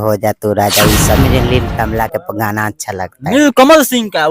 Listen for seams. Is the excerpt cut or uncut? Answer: cut